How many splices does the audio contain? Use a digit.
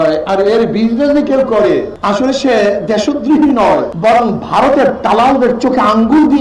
2